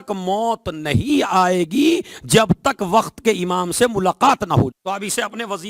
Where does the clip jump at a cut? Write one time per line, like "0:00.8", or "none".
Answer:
0:04.8